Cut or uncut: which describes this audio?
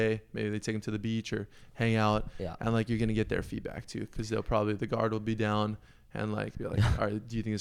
uncut